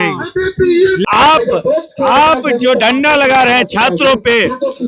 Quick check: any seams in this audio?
yes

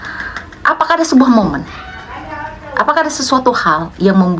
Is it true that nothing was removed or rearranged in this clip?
yes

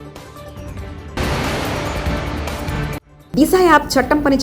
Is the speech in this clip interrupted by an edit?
yes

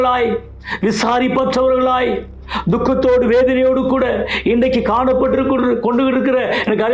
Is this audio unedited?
yes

